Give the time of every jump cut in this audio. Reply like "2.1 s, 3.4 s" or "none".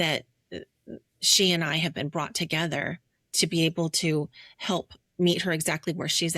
none